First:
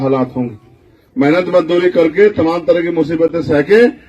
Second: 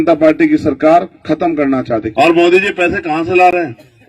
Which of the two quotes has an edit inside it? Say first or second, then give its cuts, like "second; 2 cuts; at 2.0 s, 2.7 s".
second; 1 cut; at 2.1 s